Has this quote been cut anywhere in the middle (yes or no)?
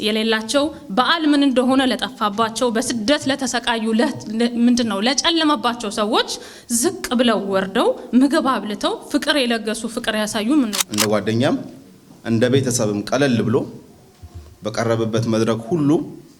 yes